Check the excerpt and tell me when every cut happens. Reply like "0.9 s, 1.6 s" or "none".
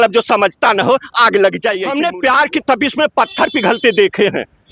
1.9 s